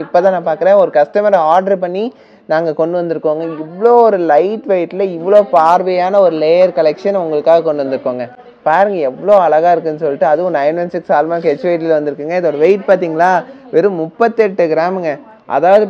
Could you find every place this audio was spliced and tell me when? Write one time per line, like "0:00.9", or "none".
none